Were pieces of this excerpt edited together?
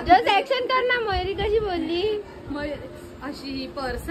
no; 0 cuts

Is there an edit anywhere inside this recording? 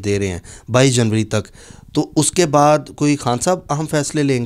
no; 0 cuts

